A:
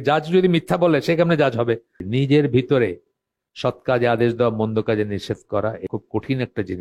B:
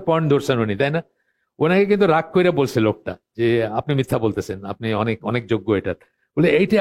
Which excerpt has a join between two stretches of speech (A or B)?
A